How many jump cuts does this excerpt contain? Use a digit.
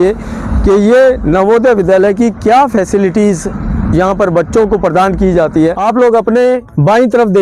1